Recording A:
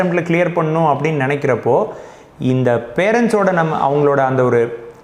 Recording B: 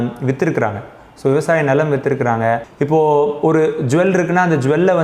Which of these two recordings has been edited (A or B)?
B